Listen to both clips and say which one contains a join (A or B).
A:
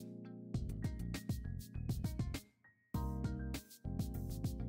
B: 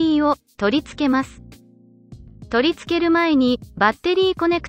A